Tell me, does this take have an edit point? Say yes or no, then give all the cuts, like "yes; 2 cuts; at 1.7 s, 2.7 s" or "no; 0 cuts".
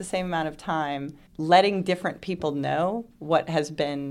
no; 0 cuts